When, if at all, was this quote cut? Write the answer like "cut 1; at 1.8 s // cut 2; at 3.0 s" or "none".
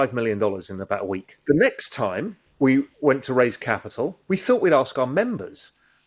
cut 1; at 1.3 s // cut 2; at 2.4 s // cut 3; at 4.2 s